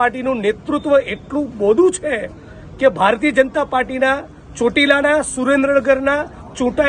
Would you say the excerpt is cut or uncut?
uncut